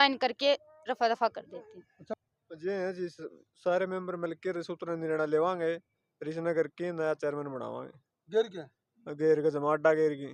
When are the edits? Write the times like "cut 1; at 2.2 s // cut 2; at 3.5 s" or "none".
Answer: cut 1; at 2.0 s